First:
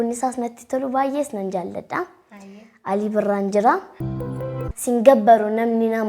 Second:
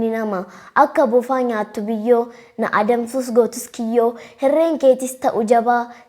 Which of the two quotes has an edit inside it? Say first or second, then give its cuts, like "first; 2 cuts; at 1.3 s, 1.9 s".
first; 1 cut; at 4.5 s